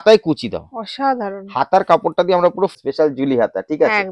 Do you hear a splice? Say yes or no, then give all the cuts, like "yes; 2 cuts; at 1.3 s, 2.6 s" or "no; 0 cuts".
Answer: yes; 1 cut; at 2.8 s